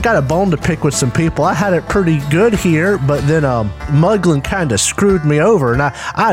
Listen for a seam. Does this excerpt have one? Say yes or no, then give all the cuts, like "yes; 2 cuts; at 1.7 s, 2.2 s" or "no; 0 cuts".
yes; 1 cut; at 3.8 s